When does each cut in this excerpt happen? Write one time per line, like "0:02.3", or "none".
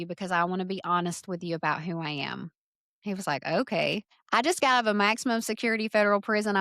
0:04.1